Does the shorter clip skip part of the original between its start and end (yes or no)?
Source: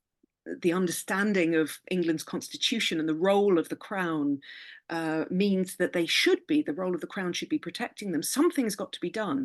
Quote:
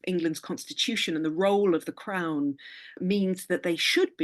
yes